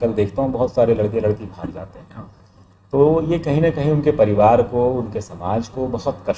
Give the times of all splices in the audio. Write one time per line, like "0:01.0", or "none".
none